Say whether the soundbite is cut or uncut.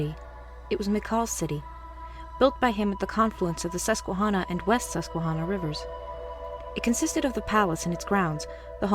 cut